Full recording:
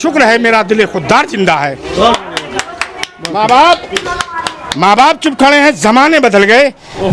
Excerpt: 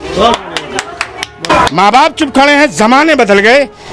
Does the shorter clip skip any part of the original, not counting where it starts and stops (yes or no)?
yes